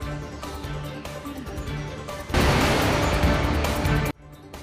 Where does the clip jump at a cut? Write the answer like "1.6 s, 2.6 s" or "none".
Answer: 2.0 s